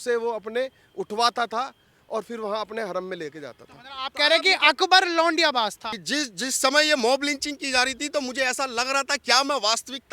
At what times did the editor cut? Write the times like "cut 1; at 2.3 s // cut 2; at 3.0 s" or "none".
cut 1; at 5.8 s